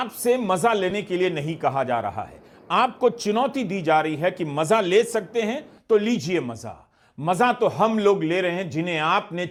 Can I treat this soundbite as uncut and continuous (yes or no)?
yes